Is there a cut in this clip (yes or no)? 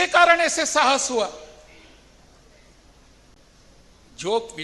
no